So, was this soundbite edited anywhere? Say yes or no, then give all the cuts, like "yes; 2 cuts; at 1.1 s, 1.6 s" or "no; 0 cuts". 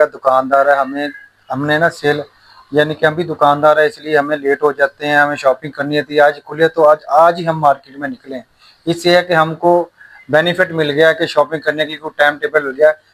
no; 0 cuts